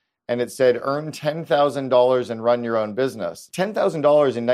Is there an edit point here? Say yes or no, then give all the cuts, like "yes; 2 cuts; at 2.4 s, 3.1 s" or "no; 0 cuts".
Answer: yes; 1 cut; at 3.4 s